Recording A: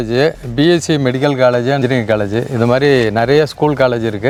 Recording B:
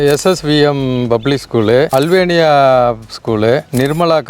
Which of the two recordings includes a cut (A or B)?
B